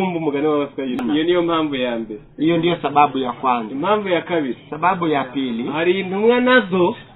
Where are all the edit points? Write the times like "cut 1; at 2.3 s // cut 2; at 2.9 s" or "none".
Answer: cut 1; at 1.0 s